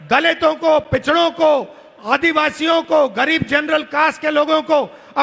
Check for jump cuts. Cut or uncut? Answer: uncut